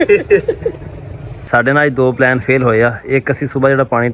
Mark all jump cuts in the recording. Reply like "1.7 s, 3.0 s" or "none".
1.3 s